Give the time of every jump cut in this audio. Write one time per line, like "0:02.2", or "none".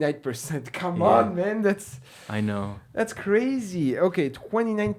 none